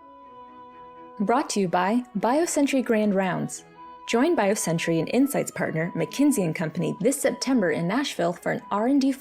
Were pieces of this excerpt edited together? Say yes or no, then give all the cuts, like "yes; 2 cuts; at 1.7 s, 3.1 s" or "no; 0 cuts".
yes; 1 cut; at 1.1 s